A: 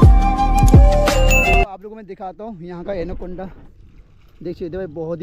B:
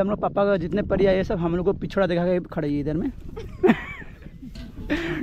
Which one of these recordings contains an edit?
A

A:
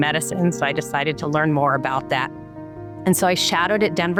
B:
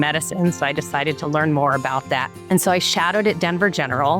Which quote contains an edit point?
B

